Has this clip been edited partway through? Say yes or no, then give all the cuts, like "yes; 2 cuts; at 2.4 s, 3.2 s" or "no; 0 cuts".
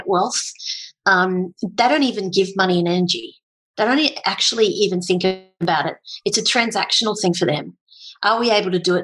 no; 0 cuts